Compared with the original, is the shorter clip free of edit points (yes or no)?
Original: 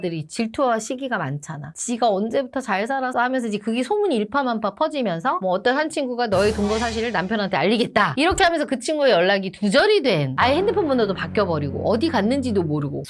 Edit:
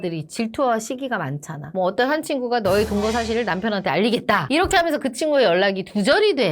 no